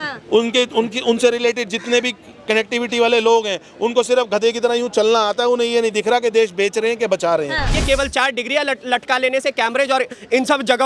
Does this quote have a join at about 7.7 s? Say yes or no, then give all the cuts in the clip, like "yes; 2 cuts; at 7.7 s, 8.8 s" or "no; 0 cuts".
yes; 1 cut; at 7.7 s